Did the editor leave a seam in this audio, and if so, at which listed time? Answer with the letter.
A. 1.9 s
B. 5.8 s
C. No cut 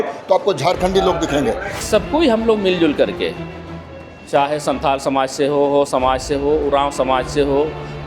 A